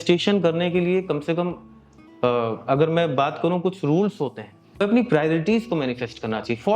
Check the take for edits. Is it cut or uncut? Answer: cut